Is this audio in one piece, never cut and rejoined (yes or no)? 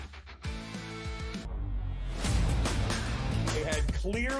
no